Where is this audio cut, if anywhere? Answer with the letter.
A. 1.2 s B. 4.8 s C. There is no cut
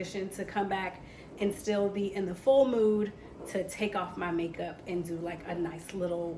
C